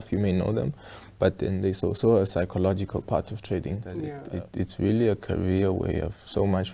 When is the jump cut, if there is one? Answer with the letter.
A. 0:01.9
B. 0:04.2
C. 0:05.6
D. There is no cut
B